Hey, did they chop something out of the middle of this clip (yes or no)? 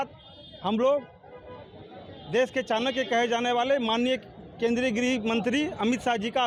no